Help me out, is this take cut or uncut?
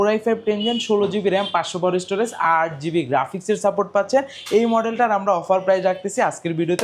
uncut